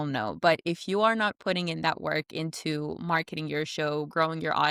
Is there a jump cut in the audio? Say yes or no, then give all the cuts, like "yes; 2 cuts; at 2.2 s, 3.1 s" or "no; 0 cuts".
no; 0 cuts